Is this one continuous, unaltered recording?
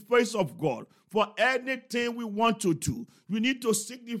yes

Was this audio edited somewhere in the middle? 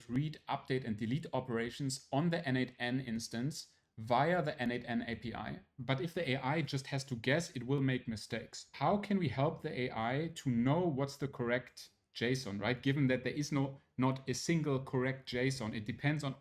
yes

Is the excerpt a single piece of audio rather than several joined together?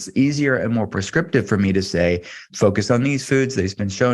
no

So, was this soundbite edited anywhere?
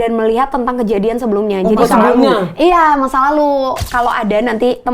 yes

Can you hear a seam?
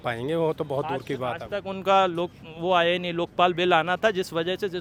no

